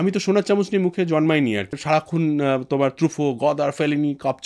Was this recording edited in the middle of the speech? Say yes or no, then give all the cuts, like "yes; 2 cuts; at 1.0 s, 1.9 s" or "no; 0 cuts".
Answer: yes; 1 cut; at 1.8 s